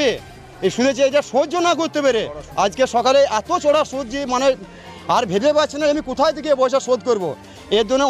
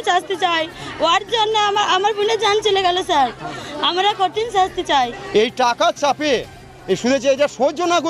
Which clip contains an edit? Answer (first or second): second